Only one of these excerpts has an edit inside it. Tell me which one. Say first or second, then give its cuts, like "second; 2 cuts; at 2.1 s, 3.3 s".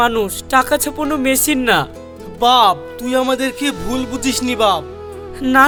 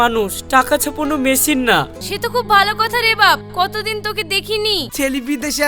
second; 2 cuts; at 2.0 s, 4.9 s